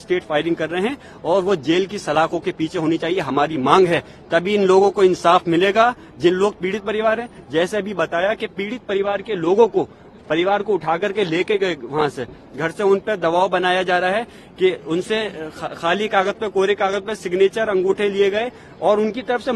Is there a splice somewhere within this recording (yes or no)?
no